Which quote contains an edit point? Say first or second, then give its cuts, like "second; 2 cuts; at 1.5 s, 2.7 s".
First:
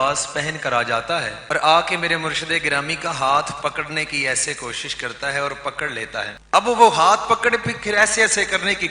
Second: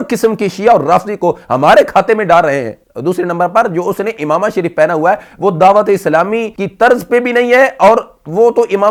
first; 2 cuts; at 1.4 s, 6.4 s